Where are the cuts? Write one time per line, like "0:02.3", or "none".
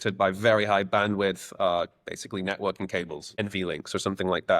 0:03.4